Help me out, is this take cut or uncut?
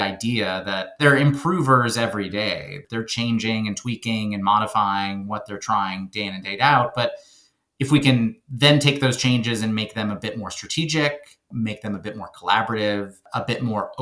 uncut